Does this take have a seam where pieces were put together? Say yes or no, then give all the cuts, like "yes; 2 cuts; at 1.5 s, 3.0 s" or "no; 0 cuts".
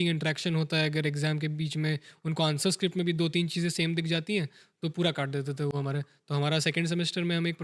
no; 0 cuts